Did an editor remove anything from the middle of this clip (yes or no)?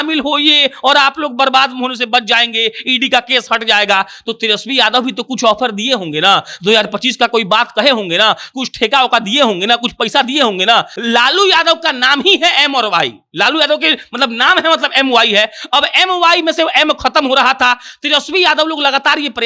yes